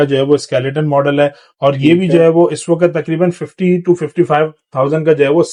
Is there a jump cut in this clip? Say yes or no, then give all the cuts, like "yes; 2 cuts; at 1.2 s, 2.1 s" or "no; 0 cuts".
no; 0 cuts